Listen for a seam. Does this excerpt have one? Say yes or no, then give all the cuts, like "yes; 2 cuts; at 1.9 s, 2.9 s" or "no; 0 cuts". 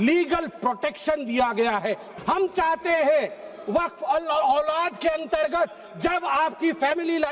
yes; 1 cut; at 2.1 s